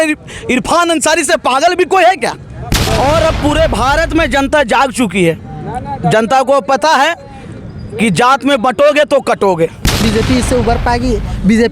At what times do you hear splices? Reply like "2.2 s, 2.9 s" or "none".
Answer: 2.8 s, 10.0 s